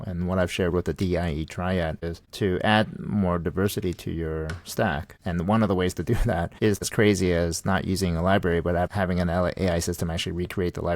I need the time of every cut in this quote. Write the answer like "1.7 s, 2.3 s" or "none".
2.0 s, 5.1 s, 6.9 s, 8.9 s